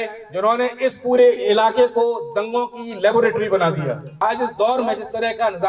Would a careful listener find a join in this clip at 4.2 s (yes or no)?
yes